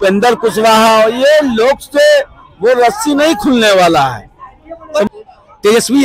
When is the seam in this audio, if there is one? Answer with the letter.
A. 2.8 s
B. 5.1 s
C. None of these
B